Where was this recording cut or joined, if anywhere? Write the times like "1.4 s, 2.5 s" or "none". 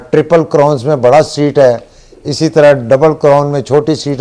none